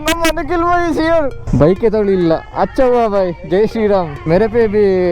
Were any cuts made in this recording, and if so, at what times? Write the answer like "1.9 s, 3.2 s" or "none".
1.3 s, 4.1 s